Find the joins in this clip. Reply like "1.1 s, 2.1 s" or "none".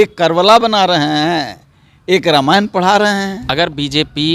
3.4 s